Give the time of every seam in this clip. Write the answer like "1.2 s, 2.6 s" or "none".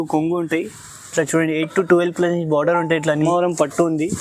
3.2 s